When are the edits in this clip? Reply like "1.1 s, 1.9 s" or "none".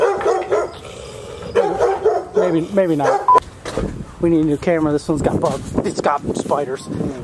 3.4 s